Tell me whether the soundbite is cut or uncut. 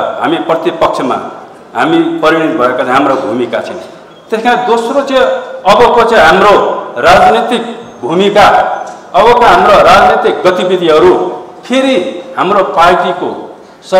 uncut